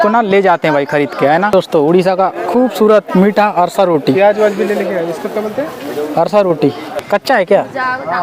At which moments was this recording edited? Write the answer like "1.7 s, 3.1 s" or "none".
1.5 s, 7.0 s